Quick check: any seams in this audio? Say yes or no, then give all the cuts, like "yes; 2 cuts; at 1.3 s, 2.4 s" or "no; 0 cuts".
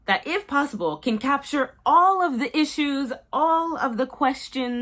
no; 0 cuts